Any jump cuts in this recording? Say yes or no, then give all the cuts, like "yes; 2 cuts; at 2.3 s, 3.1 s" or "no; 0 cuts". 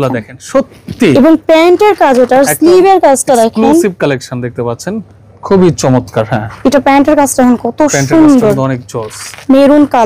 no; 0 cuts